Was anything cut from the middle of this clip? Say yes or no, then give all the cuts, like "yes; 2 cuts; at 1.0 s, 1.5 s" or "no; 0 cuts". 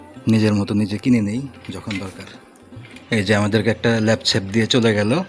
yes; 1 cut; at 2.9 s